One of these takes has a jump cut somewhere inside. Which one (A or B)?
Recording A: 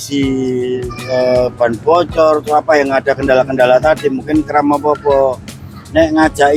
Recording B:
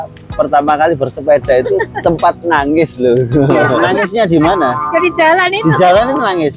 B